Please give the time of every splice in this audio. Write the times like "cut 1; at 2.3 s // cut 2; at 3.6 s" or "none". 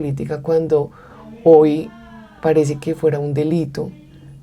none